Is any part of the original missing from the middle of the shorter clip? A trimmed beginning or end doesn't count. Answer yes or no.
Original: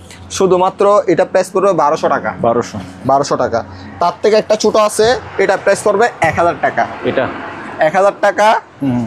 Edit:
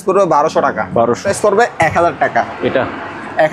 yes